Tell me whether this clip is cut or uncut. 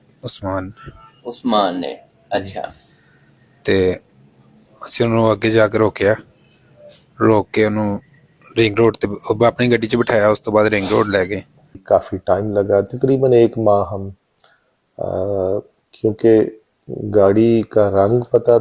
cut